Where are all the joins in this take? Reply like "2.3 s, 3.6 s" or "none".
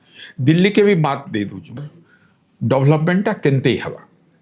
1.8 s